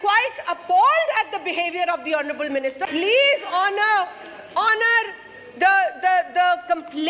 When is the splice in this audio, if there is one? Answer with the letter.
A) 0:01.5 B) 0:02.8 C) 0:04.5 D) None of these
B